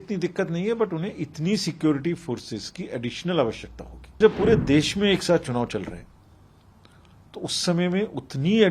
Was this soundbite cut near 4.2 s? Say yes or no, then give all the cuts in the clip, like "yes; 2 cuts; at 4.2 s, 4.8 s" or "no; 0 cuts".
yes; 1 cut; at 4.2 s